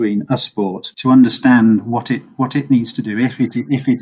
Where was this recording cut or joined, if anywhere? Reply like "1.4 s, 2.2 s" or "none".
none